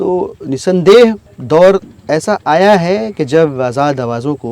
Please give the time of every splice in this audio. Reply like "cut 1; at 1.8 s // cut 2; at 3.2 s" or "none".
cut 1; at 1.3 s